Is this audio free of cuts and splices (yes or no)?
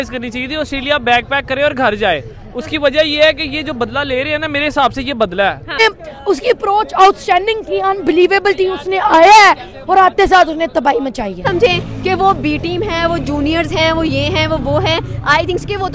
no